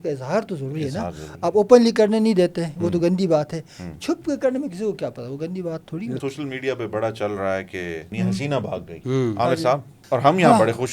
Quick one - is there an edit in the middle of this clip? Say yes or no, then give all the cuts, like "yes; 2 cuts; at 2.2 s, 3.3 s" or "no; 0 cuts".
yes; 3 cuts; at 6.2 s, 8.1 s, 8.9 s